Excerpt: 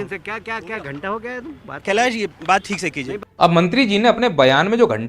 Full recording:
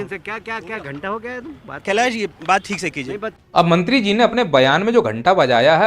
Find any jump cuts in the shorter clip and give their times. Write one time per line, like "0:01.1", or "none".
0:03.3